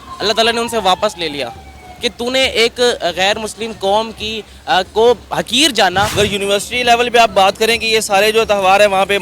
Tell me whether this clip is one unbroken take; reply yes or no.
no